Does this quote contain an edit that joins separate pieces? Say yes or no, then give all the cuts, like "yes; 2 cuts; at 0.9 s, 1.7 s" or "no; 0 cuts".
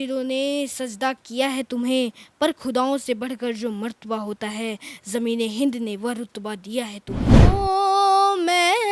yes; 1 cut; at 7.3 s